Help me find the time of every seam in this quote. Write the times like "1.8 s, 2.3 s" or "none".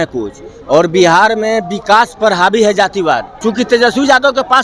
3.3 s